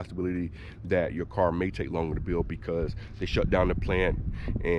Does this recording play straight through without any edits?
yes; 0 cuts

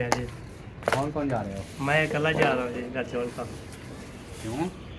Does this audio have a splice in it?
no; 0 cuts

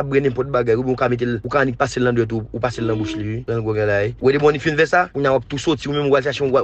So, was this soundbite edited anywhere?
yes; 4 cuts; at 1.4 s, 3.4 s, 4.1 s, 5.1 s

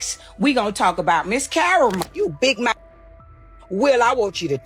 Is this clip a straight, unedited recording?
no; 1 cut; at 2.0 s

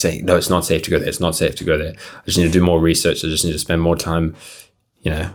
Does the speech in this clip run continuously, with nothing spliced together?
yes; 0 cuts

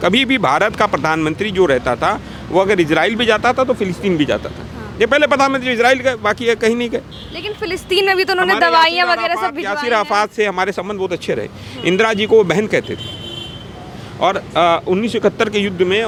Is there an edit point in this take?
no; 0 cuts

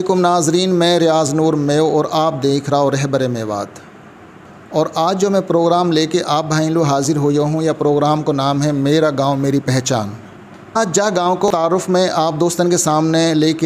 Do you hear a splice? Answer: no; 0 cuts

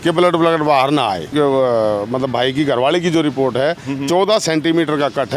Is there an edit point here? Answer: yes; 1 cut; at 1.3 s

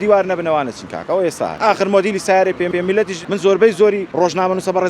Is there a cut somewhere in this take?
yes; 3 cuts; at 1.5 s, 2.7 s, 4.1 s

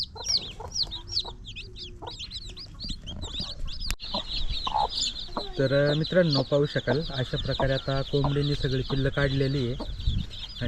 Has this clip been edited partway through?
yes; 1 cut; at 3.6 s

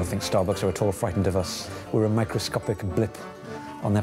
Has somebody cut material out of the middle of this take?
yes; 1 cut; at 1.6 s

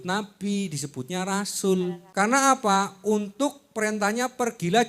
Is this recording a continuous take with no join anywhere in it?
no; 1 cut; at 2.0 s

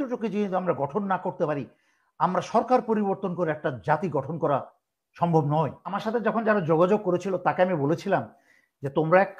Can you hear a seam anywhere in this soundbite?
yes; 1 cut; at 6.0 s

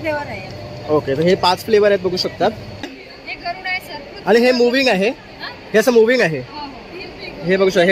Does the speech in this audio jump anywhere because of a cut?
yes; 1 cut; at 2.9 s

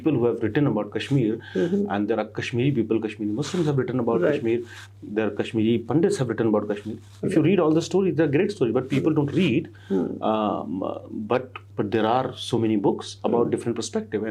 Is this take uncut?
yes; 0 cuts

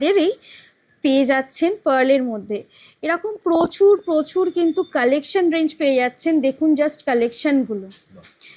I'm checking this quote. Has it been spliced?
no; 0 cuts

